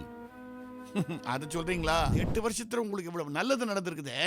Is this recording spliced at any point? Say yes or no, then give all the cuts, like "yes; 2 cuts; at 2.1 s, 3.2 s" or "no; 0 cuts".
yes; 1 cut; at 2.2 s